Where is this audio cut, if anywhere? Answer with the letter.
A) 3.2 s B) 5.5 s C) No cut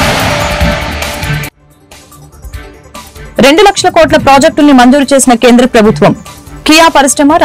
A